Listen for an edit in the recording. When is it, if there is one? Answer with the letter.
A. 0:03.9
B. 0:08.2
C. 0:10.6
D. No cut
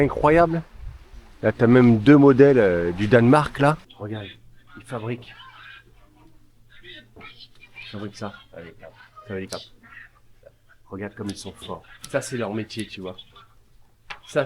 A